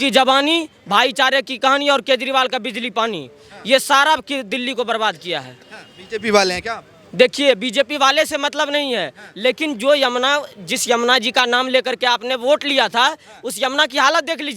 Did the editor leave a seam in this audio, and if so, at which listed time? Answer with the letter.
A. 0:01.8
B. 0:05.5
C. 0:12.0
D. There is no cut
D